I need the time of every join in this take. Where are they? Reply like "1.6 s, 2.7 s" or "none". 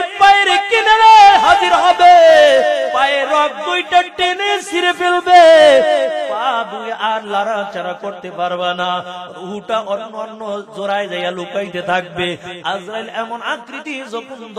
2.9 s